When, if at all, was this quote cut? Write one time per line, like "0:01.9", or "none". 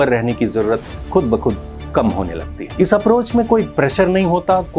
none